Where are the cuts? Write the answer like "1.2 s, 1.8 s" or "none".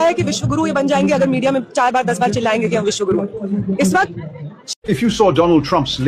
4.7 s